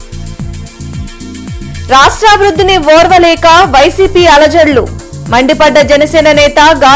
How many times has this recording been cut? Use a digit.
1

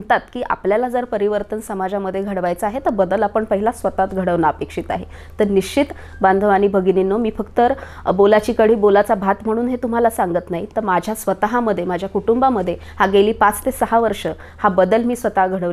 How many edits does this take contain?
0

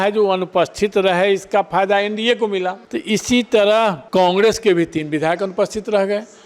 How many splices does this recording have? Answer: 2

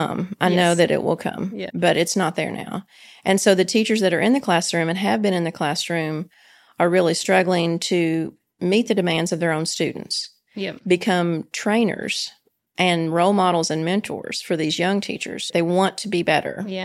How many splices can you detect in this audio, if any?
0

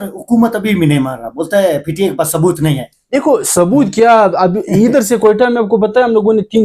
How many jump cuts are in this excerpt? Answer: 0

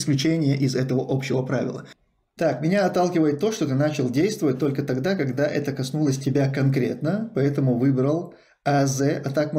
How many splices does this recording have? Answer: 1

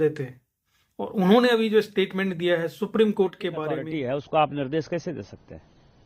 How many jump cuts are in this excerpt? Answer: 1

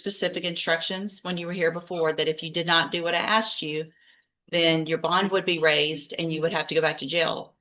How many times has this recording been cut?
0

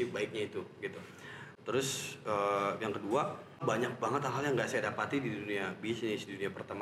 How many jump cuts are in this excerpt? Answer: 2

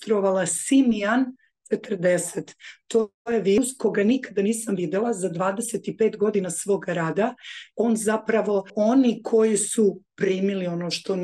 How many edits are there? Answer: 2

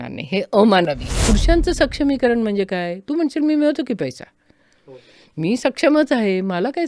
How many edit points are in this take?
1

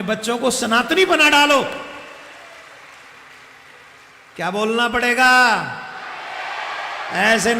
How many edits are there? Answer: 0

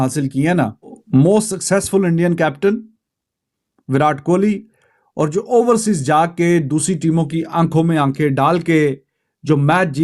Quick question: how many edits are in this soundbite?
1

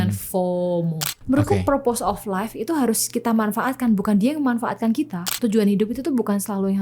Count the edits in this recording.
2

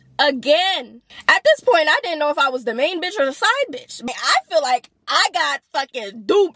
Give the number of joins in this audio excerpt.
2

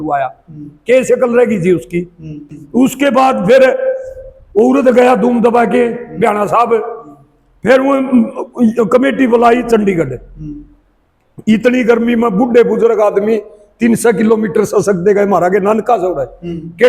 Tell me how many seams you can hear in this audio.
1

